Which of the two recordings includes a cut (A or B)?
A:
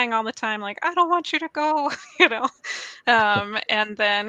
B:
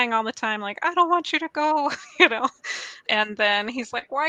B